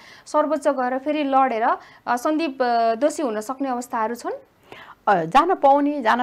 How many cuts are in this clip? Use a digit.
0